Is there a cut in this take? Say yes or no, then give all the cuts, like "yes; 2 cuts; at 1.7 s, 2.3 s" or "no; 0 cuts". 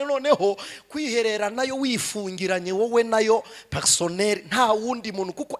no; 0 cuts